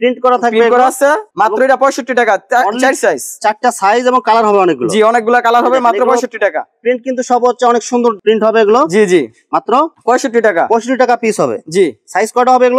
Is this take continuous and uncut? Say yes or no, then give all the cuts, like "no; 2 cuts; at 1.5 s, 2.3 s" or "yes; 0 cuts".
yes; 0 cuts